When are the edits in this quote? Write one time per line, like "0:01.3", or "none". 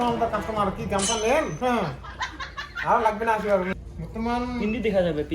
0:03.7